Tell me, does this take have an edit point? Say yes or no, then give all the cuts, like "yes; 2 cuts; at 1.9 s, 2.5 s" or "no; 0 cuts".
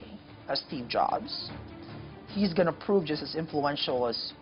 no; 0 cuts